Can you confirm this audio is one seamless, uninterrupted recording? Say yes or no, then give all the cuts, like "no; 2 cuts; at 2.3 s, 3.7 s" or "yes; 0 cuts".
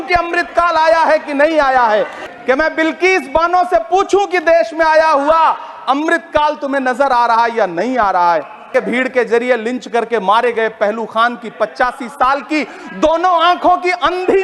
no; 2 cuts; at 2.2 s, 8.7 s